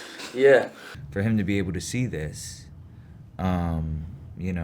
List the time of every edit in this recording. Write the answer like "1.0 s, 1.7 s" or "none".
1.0 s